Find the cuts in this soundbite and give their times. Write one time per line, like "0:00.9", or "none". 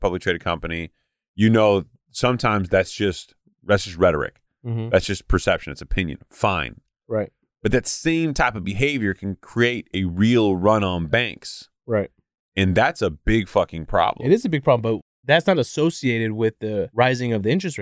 0:15.1
0:16.9